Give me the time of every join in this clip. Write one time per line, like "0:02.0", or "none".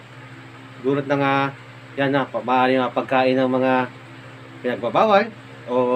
none